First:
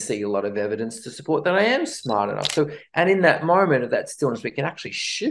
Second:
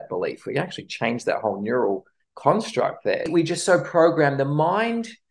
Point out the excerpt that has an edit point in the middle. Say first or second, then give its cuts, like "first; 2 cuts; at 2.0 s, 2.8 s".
second; 1 cut; at 3.3 s